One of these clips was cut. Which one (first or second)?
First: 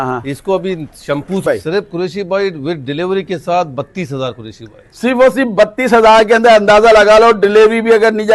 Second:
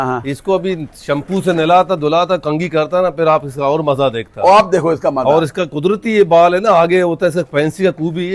first